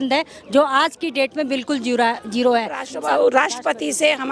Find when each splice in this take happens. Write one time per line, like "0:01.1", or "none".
0:02.9

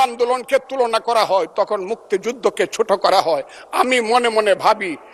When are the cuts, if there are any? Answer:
none

